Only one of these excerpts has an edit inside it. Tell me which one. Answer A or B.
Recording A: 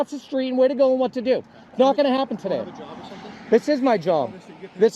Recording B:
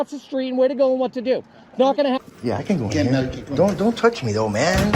B